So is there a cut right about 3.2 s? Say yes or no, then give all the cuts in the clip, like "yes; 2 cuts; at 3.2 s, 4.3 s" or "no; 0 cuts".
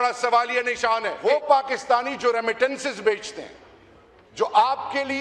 no; 1 cut; at 1.1 s